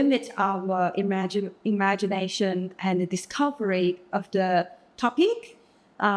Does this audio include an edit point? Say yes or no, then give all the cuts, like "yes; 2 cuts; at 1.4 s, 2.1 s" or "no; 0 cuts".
no; 0 cuts